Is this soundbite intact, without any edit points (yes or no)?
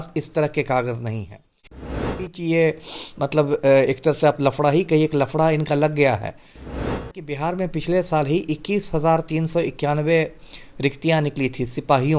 no